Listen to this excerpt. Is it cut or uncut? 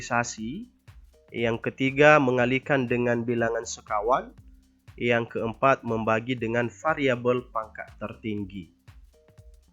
uncut